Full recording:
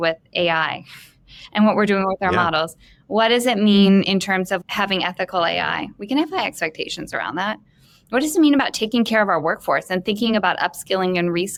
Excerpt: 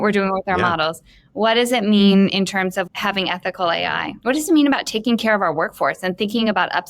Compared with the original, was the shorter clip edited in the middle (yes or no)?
yes